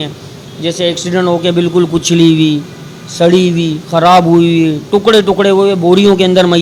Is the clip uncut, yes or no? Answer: yes